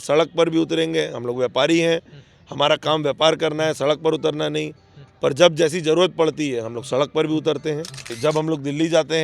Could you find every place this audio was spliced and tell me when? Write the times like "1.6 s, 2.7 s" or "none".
8.1 s